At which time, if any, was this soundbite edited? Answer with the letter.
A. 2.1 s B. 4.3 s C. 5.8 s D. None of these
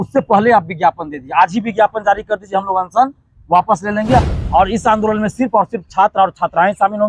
B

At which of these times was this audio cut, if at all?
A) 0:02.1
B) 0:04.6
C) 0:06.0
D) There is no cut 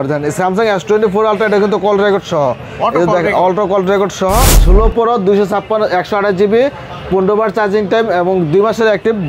B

